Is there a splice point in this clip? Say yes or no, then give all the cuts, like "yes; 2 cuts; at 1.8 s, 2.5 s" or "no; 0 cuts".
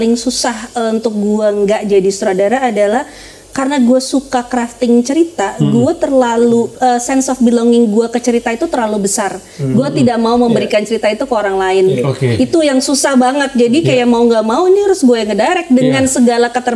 no; 0 cuts